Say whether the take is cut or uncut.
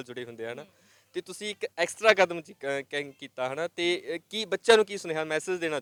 uncut